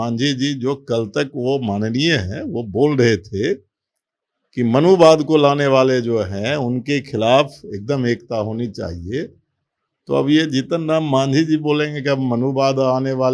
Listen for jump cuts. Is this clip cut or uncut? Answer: uncut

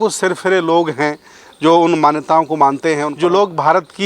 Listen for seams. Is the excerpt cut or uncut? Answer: cut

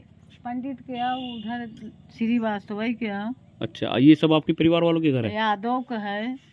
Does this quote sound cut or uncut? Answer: uncut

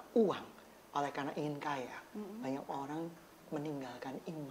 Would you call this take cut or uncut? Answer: uncut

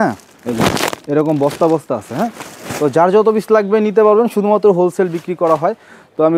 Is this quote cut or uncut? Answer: uncut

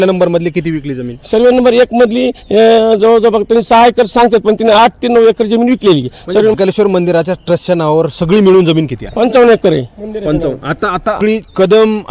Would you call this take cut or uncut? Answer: cut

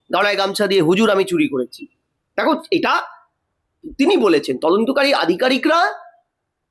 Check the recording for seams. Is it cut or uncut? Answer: uncut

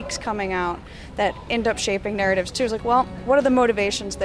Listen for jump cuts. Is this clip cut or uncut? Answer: cut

